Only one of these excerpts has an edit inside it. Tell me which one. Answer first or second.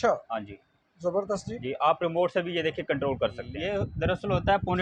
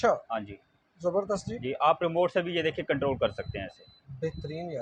first